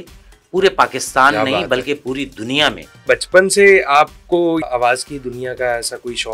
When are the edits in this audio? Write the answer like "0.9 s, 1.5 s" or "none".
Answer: 3.0 s, 4.7 s